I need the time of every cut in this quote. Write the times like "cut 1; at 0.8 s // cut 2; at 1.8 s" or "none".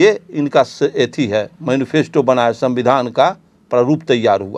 none